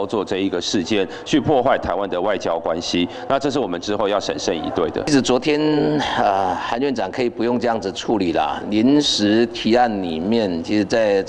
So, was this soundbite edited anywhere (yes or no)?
yes